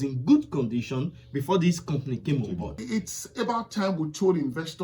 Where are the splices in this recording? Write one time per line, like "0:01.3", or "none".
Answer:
0:02.8